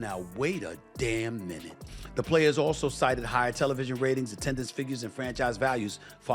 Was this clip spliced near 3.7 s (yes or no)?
no